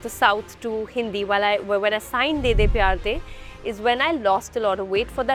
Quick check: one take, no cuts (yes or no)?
yes